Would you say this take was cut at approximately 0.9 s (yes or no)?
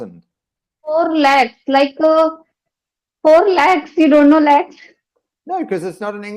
yes